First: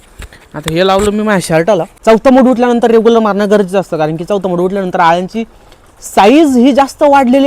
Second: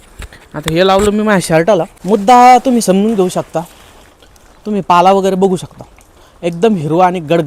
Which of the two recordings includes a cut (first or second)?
first